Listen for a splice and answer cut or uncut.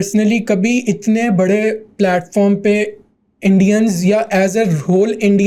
uncut